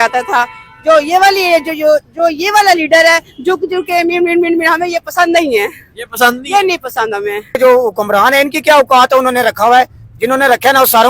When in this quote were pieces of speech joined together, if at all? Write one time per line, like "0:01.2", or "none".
0:07.6